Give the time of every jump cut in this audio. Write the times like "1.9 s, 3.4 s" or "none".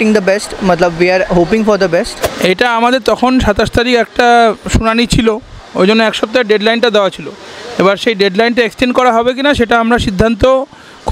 2.2 s